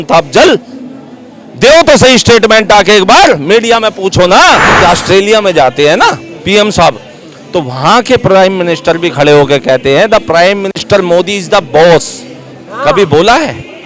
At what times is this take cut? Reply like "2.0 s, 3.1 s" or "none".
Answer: 4.8 s